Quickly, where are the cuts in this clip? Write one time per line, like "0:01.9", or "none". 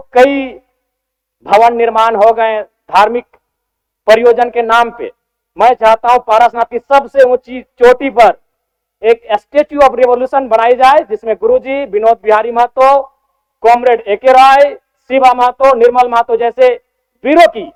none